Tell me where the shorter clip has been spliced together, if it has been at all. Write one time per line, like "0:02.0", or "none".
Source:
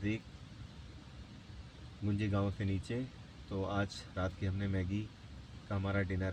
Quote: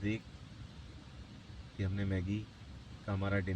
0:01.7